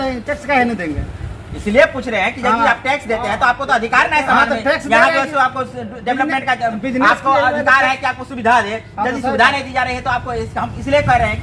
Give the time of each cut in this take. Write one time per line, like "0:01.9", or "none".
none